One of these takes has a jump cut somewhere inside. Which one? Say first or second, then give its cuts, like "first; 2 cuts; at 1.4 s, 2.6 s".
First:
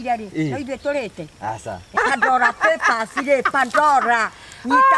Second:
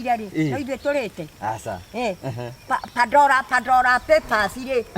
first; 1 cut; at 1.9 s